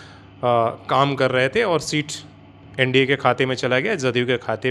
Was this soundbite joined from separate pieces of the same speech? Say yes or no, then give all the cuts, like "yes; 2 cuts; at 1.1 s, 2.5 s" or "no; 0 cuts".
no; 0 cuts